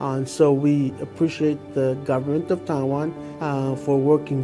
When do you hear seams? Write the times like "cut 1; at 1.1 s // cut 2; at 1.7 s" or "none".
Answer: cut 1; at 3.3 s